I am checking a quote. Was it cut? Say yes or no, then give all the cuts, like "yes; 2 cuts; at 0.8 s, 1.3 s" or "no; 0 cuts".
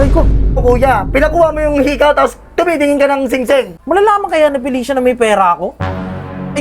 yes; 1 cut; at 3.8 s